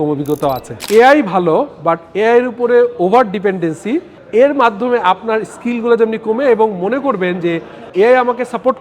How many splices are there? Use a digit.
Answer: 3